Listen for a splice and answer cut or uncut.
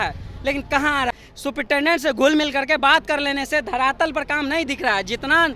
cut